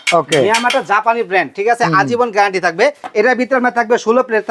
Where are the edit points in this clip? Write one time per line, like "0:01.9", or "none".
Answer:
0:03.0